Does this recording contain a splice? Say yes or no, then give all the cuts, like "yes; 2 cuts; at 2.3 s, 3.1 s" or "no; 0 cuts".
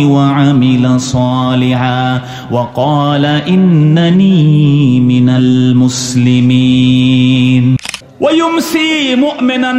yes; 1 cut; at 7.8 s